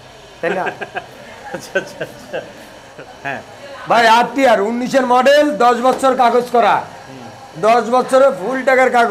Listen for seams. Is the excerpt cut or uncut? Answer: uncut